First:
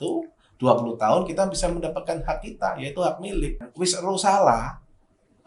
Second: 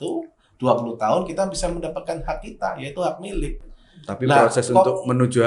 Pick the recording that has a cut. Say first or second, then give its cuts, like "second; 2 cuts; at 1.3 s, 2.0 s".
first; 1 cut; at 3.7 s